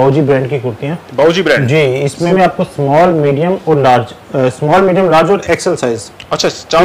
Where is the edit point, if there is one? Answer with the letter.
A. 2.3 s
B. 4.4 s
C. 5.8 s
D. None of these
A